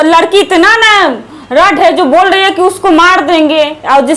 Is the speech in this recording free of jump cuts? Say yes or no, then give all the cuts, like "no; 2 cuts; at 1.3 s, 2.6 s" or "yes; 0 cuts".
yes; 0 cuts